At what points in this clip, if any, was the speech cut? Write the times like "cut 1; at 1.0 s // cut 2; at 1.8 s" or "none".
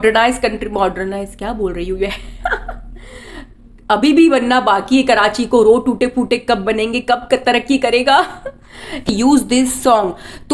cut 1; at 9.0 s

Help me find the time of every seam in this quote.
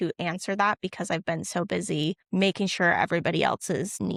none

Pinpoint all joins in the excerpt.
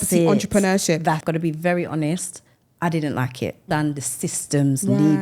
cut 1; at 1.2 s // cut 2; at 3.6 s

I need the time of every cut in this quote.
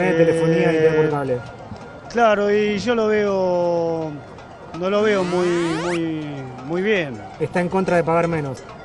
none

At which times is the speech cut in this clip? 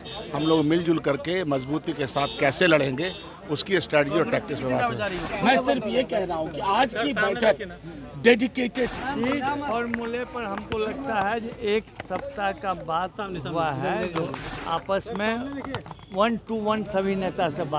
cut 1; at 5.3 s // cut 2; at 9.0 s // cut 3; at 14.5 s

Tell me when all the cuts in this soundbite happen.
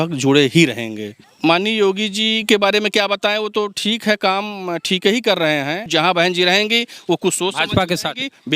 cut 1; at 1.2 s // cut 2; at 5.9 s

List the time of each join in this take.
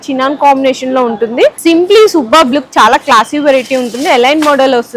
cut 1; at 1.6 s

